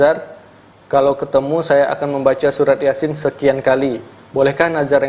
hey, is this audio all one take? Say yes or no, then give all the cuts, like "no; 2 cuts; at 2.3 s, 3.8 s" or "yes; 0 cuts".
yes; 0 cuts